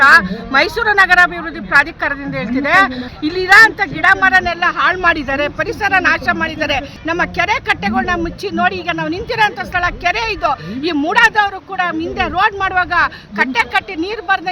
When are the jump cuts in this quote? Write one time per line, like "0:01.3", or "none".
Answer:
0:03.1
0:06.9